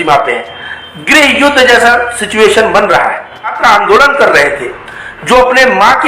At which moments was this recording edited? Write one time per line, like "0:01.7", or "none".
0:03.6